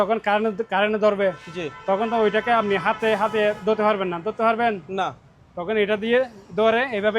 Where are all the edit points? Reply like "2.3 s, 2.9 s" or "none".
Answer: none